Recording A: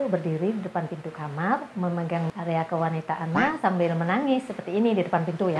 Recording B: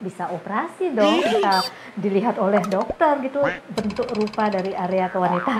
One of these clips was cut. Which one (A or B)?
A